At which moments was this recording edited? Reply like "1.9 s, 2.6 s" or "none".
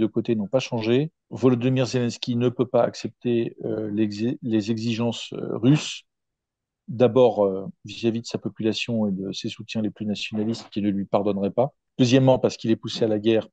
1.2 s, 11.8 s